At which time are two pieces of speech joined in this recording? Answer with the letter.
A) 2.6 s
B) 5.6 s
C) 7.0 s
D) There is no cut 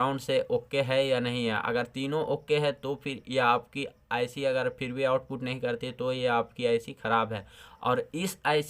D